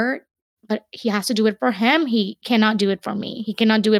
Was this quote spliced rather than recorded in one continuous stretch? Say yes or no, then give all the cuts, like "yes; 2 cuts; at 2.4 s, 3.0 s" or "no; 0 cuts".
yes; 1 cut; at 2.4 s